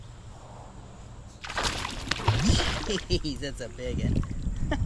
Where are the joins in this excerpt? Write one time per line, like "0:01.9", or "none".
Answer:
0:01.4

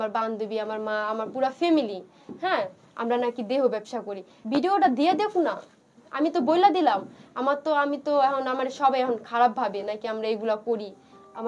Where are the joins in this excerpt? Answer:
0:04.3

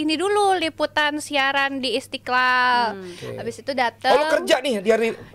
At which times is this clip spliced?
none

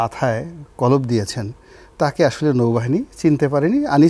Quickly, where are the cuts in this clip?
none

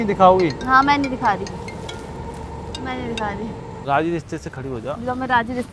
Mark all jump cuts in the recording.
0:03.7

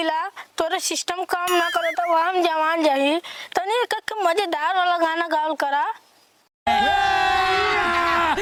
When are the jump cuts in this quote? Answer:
none

